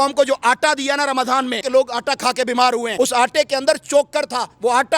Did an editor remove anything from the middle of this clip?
yes; 2 cuts; at 1.6 s, 2.9 s

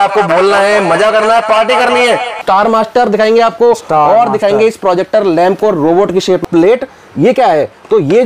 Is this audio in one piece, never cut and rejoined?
no; 2 cuts; at 2.4 s, 6.4 s

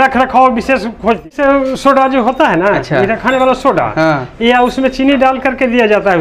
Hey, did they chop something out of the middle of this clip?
yes; 1 cut; at 1.3 s

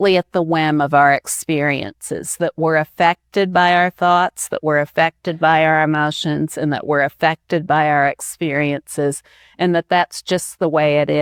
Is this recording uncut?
yes; 0 cuts

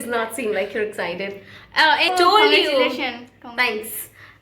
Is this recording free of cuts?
no; 1 cut; at 2.1 s

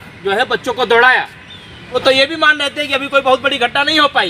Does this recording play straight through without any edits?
no; 1 cut; at 1.9 s

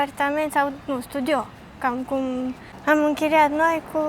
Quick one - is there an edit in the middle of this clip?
yes; 1 cut; at 2.7 s

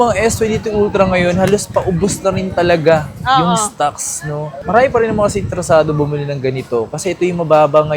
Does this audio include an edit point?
no; 0 cuts

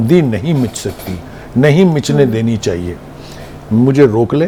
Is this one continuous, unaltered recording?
yes; 0 cuts

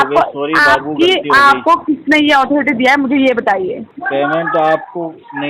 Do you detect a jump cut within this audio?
yes; 1 cut; at 3.9 s

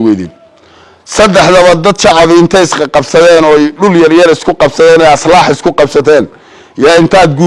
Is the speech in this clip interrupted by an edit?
no; 0 cuts

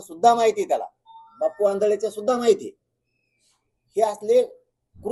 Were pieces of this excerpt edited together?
no; 0 cuts

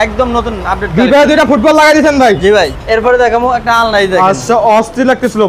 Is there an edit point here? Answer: yes; 1 cut; at 2.7 s

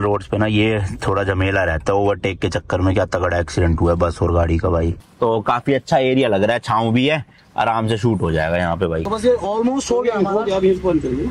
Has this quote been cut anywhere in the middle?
yes; 2 cuts; at 5.0 s, 9.0 s

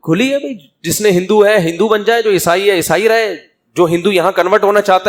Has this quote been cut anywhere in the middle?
no; 0 cuts

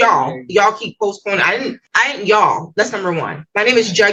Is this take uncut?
yes; 0 cuts

